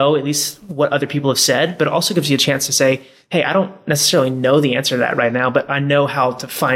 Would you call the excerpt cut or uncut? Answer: uncut